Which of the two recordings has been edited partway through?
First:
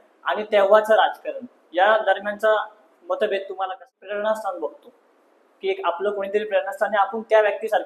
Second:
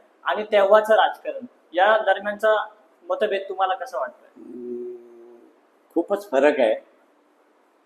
first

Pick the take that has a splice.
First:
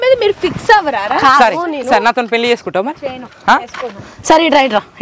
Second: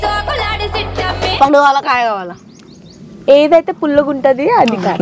second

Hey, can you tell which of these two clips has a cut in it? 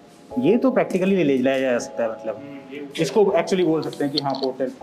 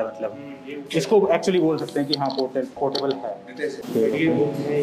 second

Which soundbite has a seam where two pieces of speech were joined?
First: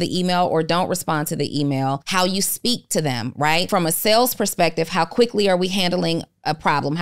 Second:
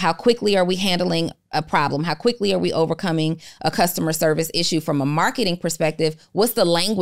first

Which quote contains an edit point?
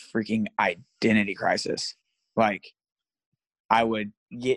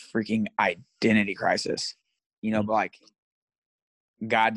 second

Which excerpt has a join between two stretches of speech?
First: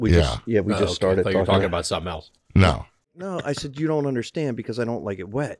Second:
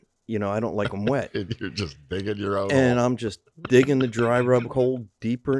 first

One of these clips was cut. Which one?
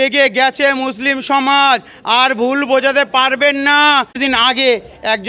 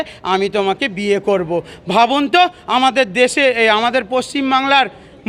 first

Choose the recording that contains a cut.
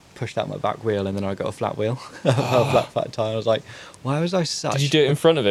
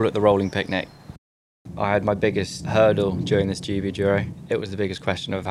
second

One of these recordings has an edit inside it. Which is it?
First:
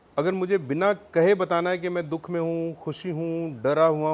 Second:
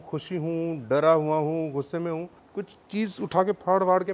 second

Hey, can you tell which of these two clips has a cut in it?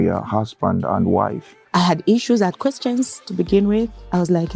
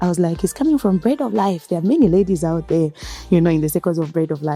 first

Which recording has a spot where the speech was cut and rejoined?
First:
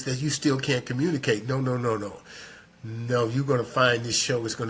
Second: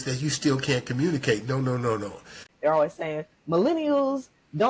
second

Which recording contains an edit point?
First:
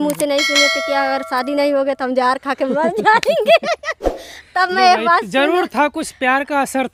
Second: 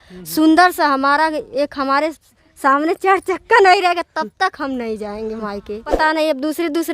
second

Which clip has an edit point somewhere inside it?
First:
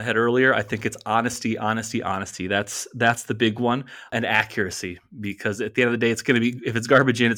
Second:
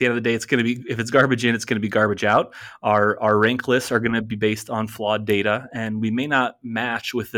first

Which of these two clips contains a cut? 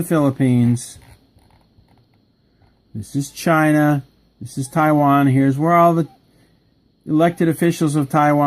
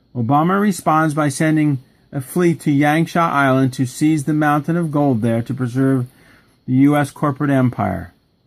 second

